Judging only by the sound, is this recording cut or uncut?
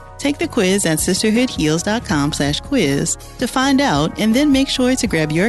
uncut